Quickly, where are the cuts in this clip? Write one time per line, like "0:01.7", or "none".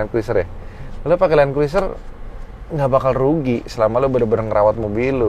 none